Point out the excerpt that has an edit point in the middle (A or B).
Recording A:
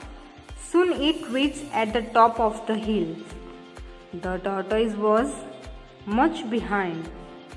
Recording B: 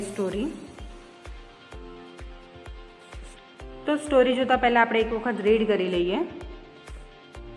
B